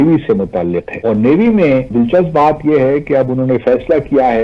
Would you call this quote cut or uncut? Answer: cut